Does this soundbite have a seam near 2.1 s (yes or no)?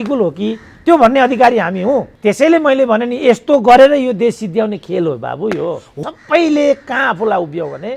yes